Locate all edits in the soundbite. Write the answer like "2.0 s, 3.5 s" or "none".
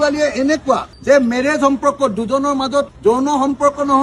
none